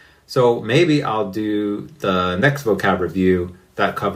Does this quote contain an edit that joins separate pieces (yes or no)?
no